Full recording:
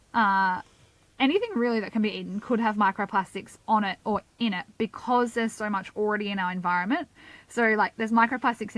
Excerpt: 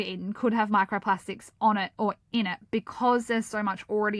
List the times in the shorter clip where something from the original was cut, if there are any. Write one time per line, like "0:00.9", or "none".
none